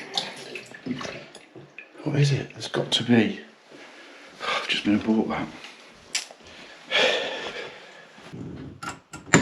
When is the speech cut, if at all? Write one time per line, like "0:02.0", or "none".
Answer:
0:06.7
0:08.3